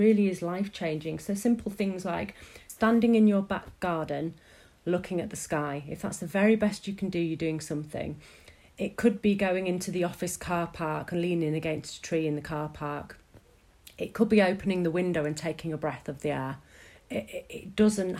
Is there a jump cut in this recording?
yes; 1 cut; at 2.6 s

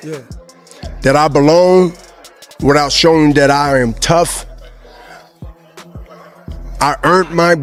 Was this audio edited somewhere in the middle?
no; 0 cuts

